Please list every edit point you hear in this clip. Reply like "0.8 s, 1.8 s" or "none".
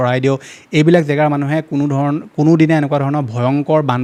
none

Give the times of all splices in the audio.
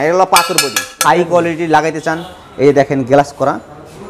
1.0 s

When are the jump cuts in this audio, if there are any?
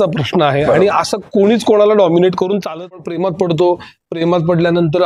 2.5 s

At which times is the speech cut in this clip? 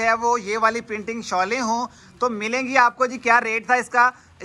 none

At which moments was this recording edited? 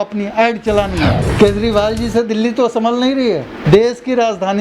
1.2 s, 3.6 s

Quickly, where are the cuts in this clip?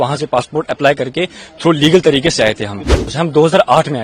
3.1 s

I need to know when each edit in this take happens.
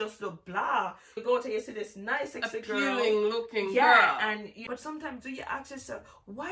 1.2 s, 4.5 s

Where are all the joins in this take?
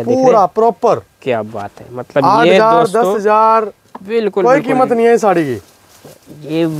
none

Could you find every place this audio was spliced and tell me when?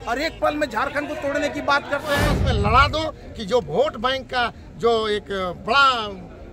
2.2 s

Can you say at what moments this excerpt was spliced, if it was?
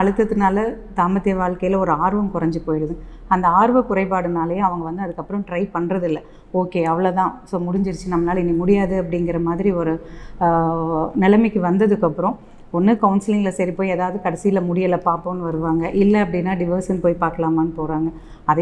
none

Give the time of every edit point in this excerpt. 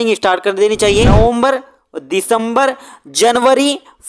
1.1 s

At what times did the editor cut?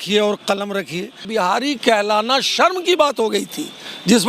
1.2 s

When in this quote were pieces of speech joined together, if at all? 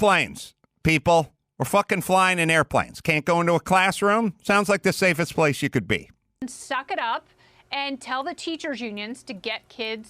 none

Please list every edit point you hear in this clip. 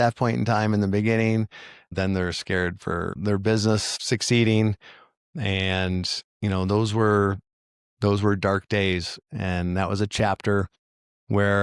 1.9 s

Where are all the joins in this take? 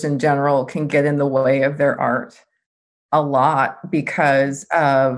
none

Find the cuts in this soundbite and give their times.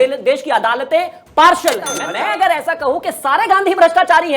2.0 s

